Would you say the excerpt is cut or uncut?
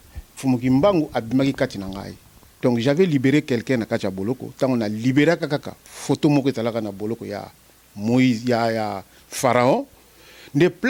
uncut